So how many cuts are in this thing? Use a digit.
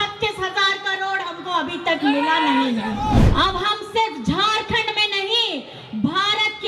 1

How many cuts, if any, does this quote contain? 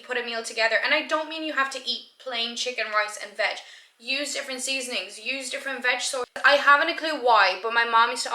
1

